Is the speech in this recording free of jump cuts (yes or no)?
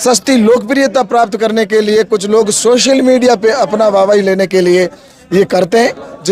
yes